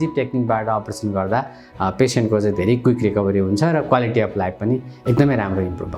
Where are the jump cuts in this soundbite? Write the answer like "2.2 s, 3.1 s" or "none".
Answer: none